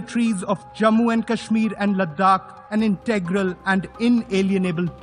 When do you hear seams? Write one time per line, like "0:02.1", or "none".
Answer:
0:02.6

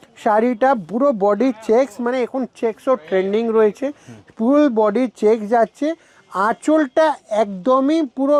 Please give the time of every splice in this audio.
none

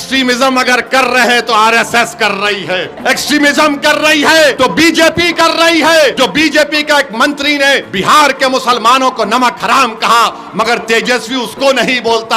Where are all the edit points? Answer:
0:02.9
0:04.5
0:06.1
0:07.9

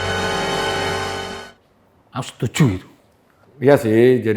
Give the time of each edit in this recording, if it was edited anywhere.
none

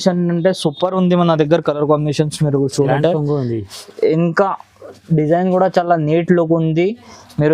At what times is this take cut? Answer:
0:02.8

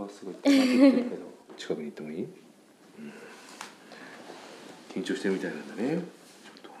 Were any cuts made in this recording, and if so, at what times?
0:01.5

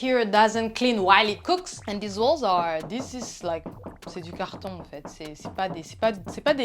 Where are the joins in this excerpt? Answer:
0:01.7

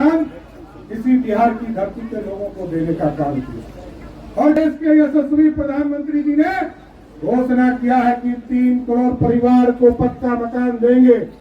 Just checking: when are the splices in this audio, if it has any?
0:04.6

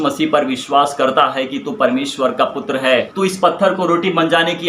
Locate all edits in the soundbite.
0:03.1

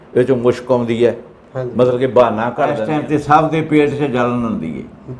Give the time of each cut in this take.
0:02.8

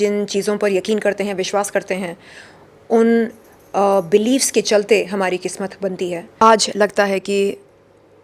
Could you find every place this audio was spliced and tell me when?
0:06.4

